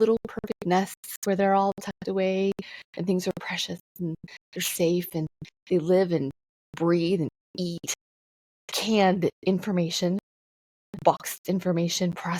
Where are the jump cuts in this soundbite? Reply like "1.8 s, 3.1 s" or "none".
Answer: none